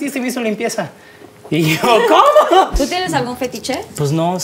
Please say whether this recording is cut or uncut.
cut